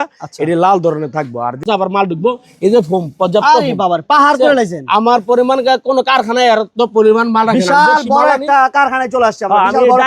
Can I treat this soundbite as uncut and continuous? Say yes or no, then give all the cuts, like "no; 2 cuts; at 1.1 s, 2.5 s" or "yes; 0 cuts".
no; 1 cut; at 1.6 s